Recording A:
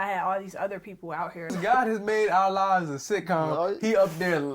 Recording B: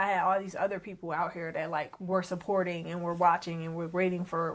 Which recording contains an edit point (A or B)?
A